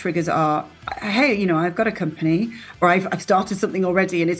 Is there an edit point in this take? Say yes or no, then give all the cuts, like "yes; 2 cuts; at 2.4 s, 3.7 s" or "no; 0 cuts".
yes; 1 cut; at 2.8 s